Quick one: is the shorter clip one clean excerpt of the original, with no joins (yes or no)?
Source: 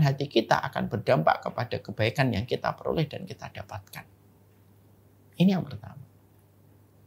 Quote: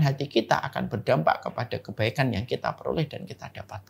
yes